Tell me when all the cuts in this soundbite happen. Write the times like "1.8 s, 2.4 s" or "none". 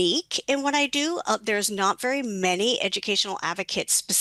none

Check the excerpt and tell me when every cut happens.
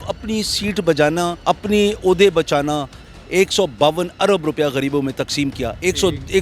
1.4 s, 3.0 s

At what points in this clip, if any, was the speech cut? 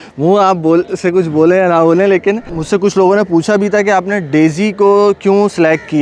2.5 s

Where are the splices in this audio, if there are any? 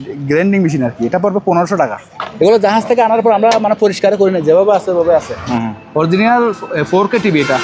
2.2 s, 5.4 s

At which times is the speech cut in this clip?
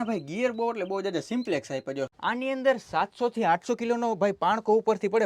2.1 s

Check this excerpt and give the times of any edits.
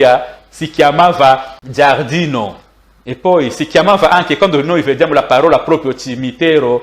1.6 s

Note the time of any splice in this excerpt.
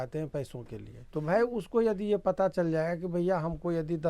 1.0 s

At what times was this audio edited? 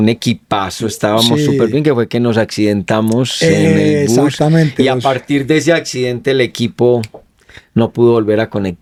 none

